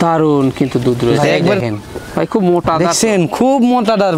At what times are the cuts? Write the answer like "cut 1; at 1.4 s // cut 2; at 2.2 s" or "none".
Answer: cut 1; at 1.6 s